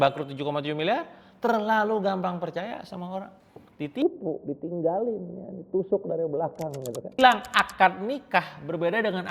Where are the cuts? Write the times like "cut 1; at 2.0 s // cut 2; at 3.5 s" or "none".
cut 1; at 7.2 s